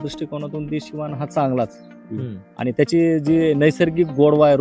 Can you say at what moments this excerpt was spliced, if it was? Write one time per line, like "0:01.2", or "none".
none